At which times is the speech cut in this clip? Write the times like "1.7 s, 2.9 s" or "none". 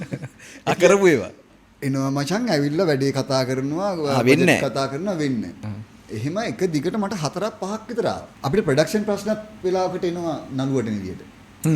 8.3 s